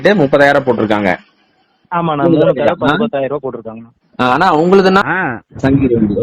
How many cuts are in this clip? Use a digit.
1